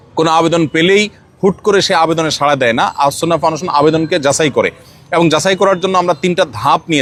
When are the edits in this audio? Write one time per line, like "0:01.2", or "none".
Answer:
none